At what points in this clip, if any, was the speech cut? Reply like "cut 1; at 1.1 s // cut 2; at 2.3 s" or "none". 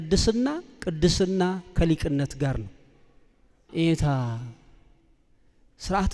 cut 1; at 3.7 s